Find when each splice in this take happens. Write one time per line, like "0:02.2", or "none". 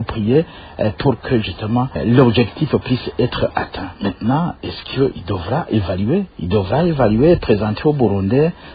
0:02.0
0:03.9
0:06.4